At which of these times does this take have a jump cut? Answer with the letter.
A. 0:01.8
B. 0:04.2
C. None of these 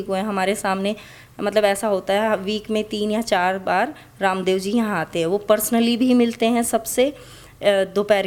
C